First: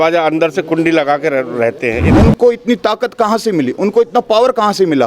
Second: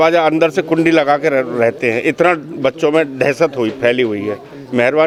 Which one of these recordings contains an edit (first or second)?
first